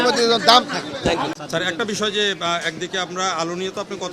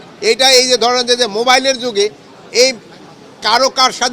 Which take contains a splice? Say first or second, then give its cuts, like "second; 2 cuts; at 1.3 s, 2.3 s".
first; 1 cut; at 1.4 s